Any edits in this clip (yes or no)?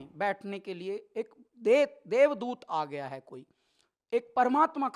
no